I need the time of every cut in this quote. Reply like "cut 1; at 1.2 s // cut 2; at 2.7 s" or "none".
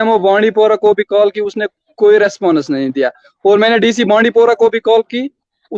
none